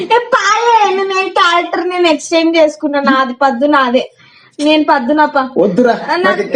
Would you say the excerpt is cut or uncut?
uncut